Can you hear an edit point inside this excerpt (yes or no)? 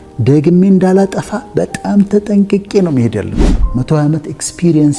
yes